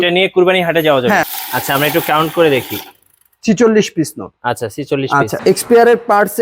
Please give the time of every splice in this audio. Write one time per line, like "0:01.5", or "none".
0:01.3
0:05.4